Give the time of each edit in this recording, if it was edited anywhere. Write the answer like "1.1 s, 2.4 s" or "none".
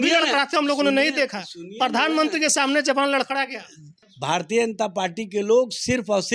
4.1 s